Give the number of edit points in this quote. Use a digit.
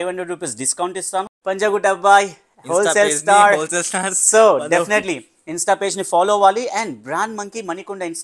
1